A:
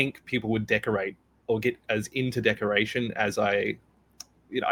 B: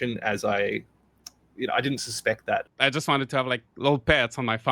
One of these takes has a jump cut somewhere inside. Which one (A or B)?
B